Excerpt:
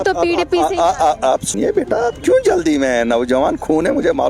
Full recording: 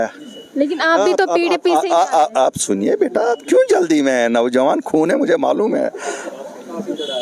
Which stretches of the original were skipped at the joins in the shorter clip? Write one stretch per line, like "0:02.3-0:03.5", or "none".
0:02.6-0:02.7